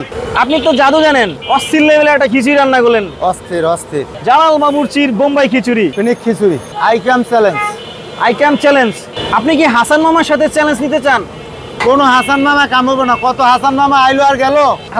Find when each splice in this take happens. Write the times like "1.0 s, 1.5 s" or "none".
none